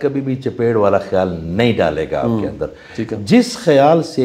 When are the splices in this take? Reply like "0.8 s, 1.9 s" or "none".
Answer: none